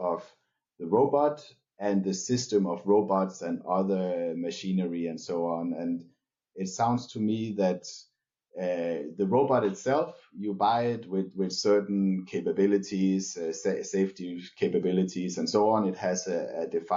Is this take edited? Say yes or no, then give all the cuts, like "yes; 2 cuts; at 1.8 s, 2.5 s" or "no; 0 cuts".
no; 0 cuts